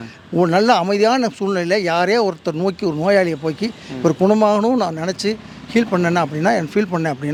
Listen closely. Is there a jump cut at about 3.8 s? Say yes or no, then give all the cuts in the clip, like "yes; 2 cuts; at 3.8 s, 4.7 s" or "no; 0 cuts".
no; 0 cuts